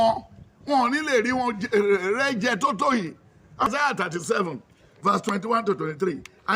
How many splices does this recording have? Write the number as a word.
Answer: one